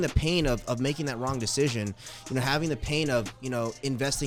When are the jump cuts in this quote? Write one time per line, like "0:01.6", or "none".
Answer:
none